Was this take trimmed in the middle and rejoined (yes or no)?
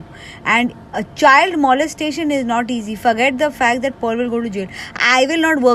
no